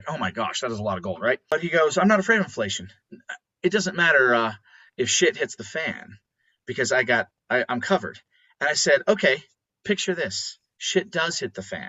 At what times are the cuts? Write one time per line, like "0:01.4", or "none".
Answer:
0:01.5